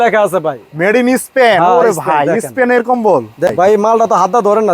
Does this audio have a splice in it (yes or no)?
yes